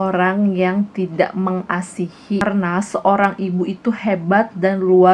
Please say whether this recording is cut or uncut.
cut